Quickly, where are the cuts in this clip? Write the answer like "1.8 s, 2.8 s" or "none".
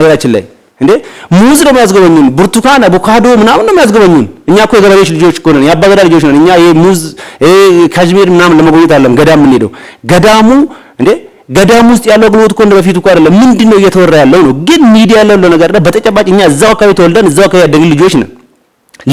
none